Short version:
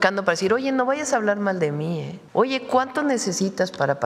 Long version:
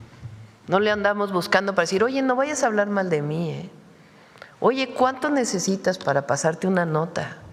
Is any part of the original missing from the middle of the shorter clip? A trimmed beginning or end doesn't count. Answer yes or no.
yes